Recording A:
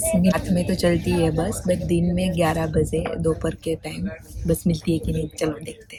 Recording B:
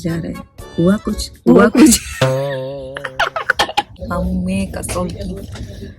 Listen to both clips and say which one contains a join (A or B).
B